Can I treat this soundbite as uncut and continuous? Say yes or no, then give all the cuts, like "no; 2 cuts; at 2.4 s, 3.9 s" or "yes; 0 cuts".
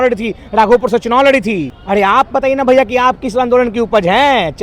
no; 1 cut; at 1.7 s